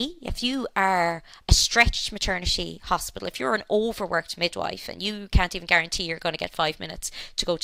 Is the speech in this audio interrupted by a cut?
no; 0 cuts

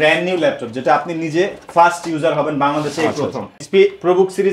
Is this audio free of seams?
no; 1 cut; at 3.6 s

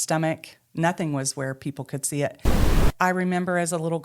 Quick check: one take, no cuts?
no; 1 cut; at 2.8 s

